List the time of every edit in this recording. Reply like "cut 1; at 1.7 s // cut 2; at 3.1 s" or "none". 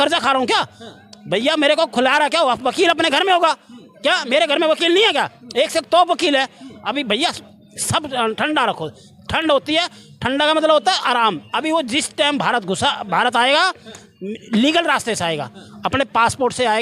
none